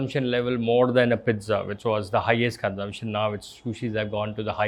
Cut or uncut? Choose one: uncut